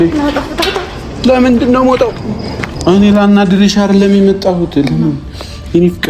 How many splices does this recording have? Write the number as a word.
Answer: one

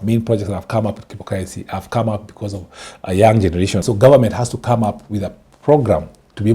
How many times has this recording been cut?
one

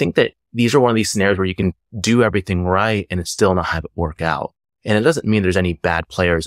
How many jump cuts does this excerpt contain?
one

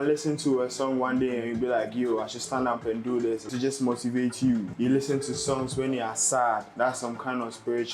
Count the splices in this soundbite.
three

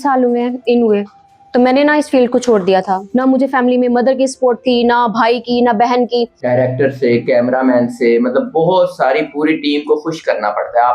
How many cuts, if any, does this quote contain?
two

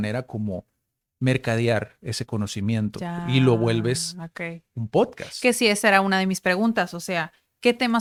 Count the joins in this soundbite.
zero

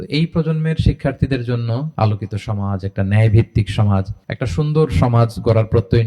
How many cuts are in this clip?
one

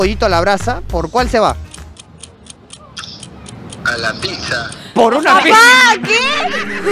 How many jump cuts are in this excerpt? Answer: zero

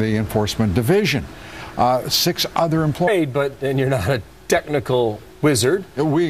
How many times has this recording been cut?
zero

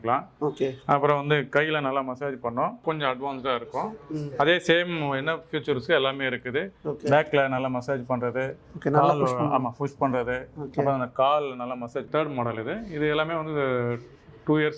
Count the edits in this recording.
two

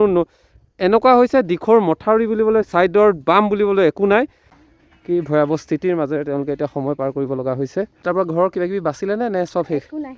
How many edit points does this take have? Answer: two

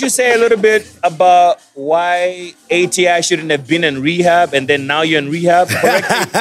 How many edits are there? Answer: two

